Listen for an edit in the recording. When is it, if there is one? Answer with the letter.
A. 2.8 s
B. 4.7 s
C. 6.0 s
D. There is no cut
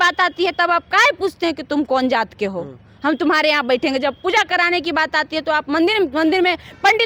D